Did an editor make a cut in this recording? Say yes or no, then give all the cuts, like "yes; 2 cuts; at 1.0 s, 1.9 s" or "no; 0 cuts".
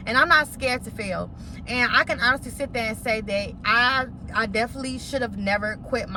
no; 0 cuts